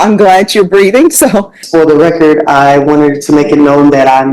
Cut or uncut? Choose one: cut